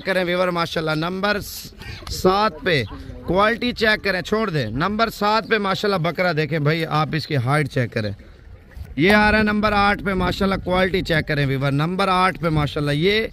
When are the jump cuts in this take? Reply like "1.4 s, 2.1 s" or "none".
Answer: none